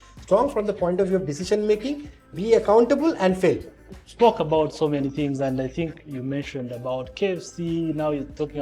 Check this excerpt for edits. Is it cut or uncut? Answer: cut